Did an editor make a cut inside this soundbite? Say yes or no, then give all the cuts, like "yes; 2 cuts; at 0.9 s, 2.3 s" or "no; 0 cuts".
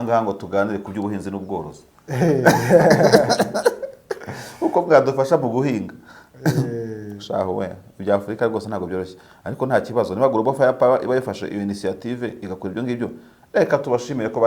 no; 0 cuts